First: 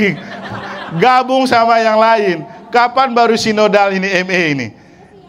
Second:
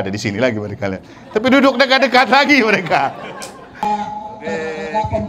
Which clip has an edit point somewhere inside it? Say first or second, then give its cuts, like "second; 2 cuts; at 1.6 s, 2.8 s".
second; 1 cut; at 3.6 s